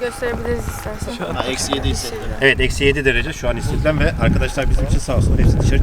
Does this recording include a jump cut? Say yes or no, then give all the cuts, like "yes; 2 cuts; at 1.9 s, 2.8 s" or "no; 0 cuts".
yes; 1 cut; at 1.3 s